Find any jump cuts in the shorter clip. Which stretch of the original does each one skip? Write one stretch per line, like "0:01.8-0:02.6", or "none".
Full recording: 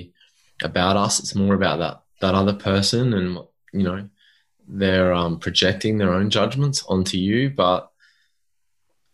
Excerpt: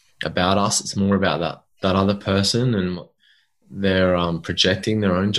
0:03.6-0:04.1